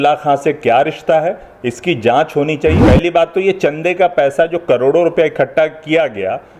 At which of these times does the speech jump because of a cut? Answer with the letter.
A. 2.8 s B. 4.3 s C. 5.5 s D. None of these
A